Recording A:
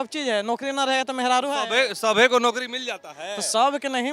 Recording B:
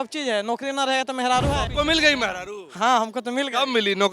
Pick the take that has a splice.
B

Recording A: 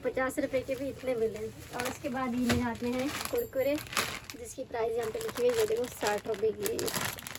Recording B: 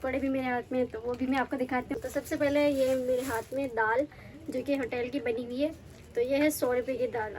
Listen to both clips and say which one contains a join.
B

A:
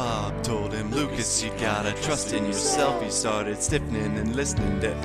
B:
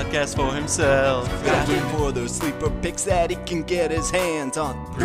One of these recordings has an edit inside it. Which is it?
B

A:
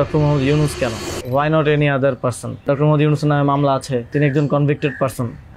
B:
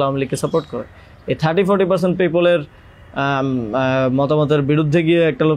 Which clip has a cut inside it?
A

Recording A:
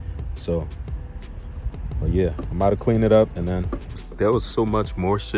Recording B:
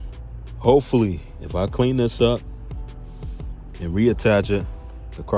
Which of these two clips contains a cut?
A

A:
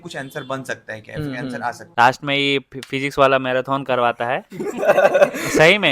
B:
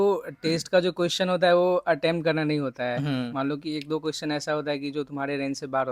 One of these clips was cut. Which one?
A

